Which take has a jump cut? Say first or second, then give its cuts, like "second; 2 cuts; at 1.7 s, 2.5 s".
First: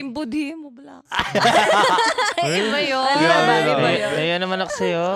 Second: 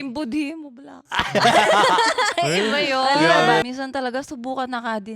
second; 1 cut; at 3.6 s